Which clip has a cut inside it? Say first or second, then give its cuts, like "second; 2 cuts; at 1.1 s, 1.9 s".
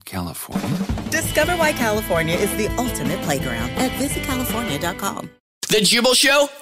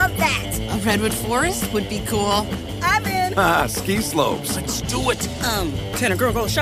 first; 1 cut; at 5.6 s